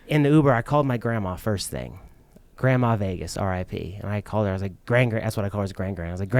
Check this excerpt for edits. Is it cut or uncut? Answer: uncut